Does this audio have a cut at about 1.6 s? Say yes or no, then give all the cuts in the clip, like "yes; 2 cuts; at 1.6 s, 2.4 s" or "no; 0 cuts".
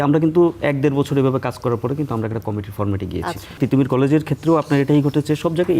no; 1 cut; at 3.6 s